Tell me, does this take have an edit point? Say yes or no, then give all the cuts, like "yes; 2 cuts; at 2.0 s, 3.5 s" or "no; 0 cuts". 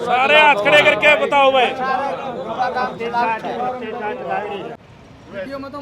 yes; 1 cut; at 4.8 s